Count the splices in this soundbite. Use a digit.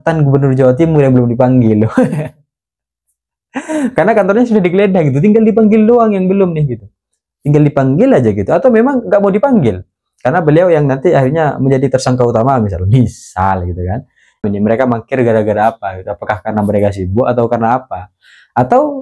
1